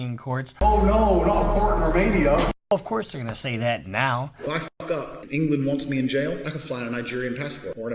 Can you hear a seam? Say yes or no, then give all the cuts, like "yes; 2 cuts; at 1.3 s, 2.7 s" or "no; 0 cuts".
yes; 1 cut; at 4.4 s